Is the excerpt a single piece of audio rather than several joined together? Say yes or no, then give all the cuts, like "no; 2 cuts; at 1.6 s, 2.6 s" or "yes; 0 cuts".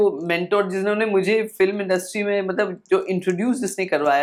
yes; 0 cuts